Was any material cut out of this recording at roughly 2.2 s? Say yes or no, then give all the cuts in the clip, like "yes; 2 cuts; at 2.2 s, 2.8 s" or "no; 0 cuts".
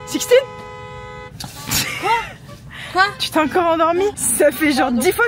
no; 1 cut; at 4.2 s